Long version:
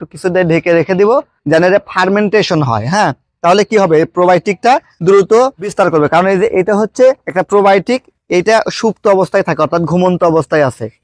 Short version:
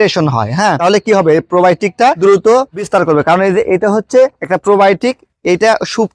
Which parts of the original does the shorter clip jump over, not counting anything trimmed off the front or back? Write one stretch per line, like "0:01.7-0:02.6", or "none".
0:03.1-0:03.4
0:04.8-0:05.0